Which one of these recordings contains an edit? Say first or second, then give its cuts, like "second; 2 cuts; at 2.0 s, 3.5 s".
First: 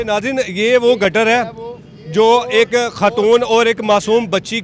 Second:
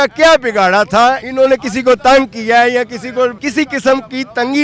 second; 2 cuts; at 1.2 s, 3.4 s